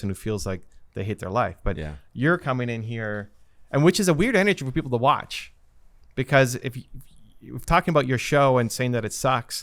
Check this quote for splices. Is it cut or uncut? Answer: uncut